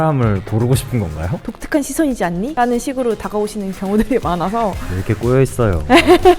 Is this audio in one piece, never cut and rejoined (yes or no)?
no